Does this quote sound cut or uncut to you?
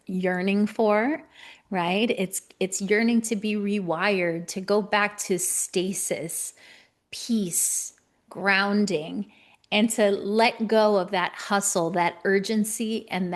uncut